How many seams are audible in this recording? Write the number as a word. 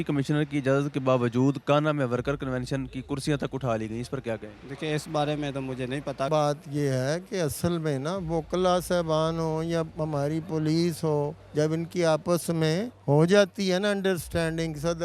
two